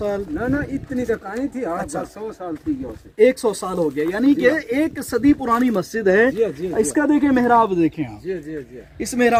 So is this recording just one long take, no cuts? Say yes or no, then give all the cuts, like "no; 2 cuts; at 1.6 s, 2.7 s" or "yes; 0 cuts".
yes; 0 cuts